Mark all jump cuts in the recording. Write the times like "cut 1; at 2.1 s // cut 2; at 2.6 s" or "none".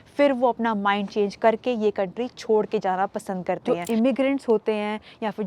cut 1; at 3.6 s